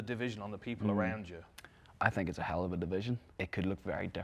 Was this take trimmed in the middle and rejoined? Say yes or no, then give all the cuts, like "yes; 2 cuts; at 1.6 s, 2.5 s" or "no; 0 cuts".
yes; 1 cut; at 3.3 s